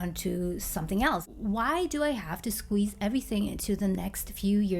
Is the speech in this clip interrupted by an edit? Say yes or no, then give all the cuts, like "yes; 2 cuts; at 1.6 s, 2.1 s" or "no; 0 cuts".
yes; 1 cut; at 1.3 s